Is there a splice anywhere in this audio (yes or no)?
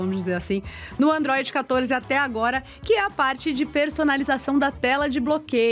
no